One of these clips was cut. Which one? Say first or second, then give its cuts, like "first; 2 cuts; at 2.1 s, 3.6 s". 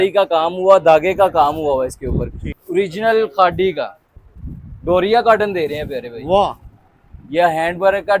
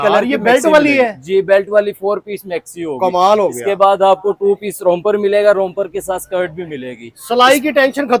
first; 1 cut; at 2.6 s